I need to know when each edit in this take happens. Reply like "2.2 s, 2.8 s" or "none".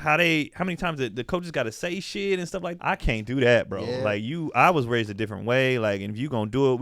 2.7 s